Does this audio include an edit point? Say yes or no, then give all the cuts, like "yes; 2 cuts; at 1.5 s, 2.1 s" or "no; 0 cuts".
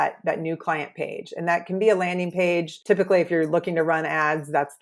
yes; 1 cut; at 2.7 s